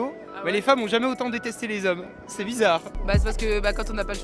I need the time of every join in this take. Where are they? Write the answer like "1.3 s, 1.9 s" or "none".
2.9 s